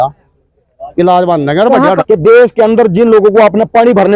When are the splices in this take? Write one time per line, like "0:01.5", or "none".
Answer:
0:02.0